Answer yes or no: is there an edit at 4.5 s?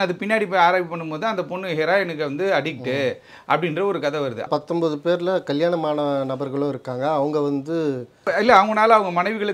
yes